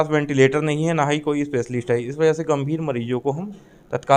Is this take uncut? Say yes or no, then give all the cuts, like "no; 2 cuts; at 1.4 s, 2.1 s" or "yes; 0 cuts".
yes; 0 cuts